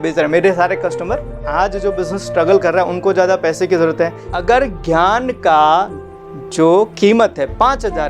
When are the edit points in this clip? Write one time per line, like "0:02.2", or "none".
0:01.5
0:04.2